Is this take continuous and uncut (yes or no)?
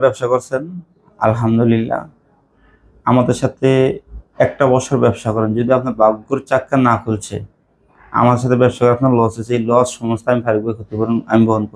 yes